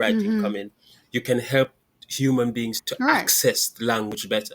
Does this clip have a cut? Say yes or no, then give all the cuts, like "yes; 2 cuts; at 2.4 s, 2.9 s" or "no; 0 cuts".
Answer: yes; 1 cut; at 2.8 s